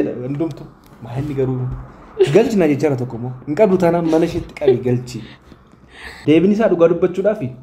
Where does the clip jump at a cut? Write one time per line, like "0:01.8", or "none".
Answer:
0:06.1